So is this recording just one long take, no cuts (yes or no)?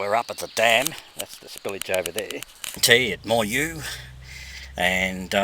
no